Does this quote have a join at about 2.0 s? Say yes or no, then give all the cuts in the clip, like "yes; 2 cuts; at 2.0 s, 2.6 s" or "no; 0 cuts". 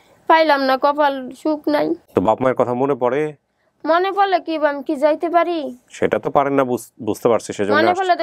yes; 1 cut; at 2.0 s